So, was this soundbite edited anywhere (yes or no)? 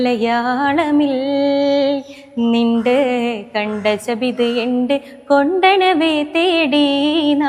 no